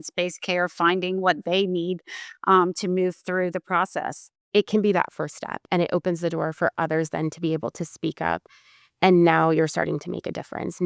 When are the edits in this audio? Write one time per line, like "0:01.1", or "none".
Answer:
0:04.4